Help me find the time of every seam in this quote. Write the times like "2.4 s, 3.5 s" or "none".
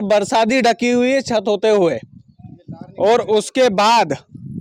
none